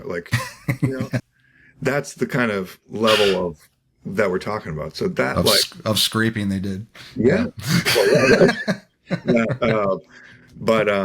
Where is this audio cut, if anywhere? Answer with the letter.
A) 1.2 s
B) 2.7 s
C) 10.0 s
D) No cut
A